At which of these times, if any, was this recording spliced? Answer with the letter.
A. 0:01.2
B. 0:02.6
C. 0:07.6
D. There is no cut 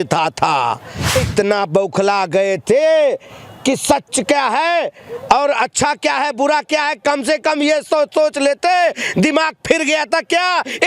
A